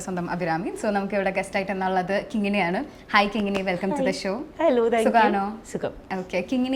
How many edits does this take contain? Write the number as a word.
zero